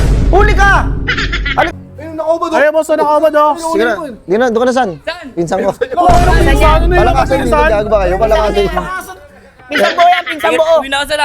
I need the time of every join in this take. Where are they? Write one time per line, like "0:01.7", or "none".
0:01.7